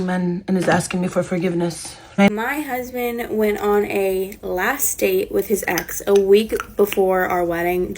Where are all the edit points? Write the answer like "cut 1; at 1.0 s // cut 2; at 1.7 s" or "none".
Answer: cut 1; at 2.3 s